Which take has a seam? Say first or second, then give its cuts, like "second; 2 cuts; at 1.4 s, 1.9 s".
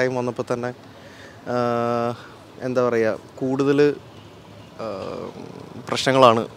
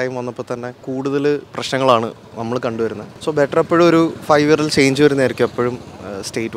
second; 2 cuts; at 1.3 s, 3.1 s